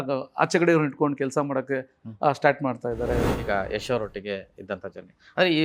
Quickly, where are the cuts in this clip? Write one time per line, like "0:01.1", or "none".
0:03.2